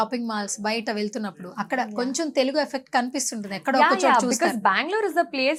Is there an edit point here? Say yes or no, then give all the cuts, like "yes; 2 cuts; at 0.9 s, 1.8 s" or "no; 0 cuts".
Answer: no; 0 cuts